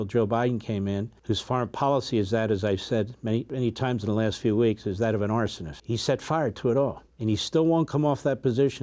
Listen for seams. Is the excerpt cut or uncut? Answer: cut